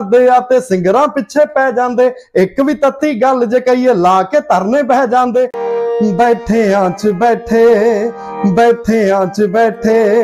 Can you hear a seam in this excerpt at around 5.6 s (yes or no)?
yes